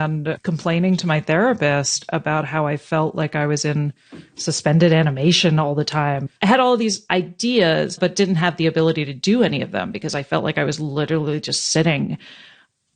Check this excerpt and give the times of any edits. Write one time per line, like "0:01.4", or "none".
0:06.3

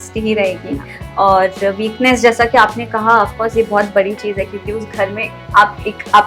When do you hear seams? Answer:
none

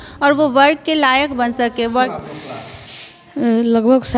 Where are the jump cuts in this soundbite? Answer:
0:02.1

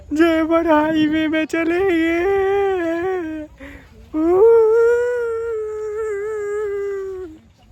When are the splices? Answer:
none

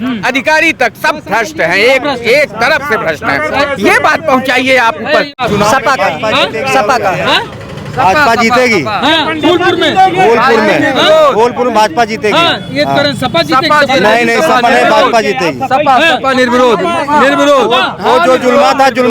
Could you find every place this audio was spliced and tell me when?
0:05.3

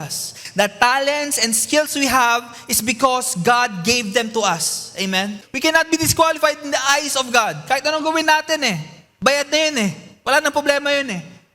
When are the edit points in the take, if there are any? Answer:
0:05.4

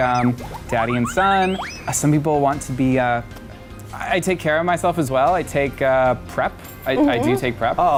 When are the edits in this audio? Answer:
none

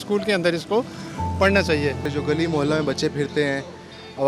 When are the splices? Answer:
0:02.1

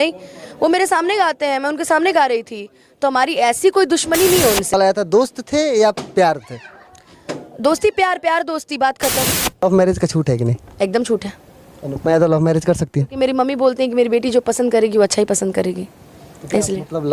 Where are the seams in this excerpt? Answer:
0:04.7
0:09.6

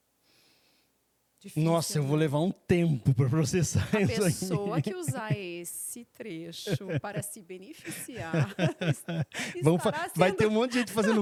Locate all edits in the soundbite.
none

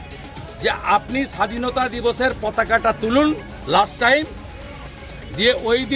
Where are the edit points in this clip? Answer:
none

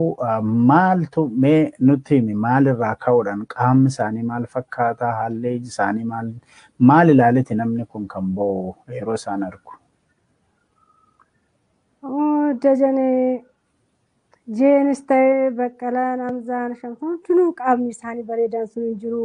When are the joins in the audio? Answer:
none

